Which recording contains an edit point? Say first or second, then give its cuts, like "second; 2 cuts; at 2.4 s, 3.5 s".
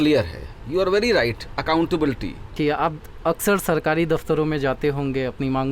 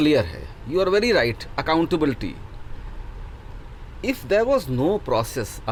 first; 1 cut; at 2.5 s